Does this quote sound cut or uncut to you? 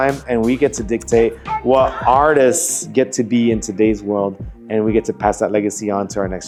uncut